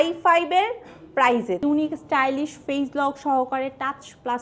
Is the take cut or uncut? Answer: cut